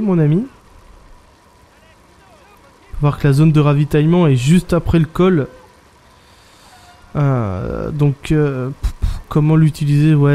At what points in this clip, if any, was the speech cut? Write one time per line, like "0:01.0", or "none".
0:07.3